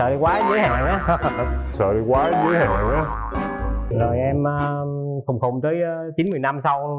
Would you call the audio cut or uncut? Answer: cut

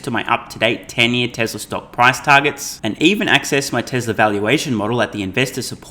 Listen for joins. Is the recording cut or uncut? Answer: uncut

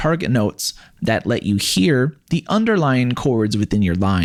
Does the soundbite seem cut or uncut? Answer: uncut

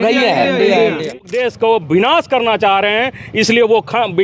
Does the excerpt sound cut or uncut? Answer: cut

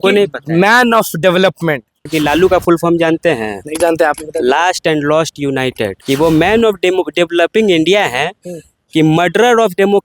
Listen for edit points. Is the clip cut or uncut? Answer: cut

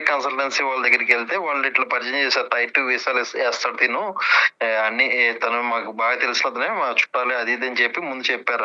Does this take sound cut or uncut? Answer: uncut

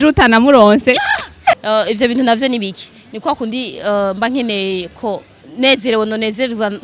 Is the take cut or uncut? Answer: cut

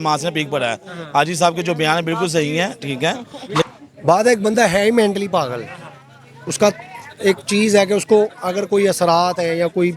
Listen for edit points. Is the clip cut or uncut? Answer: cut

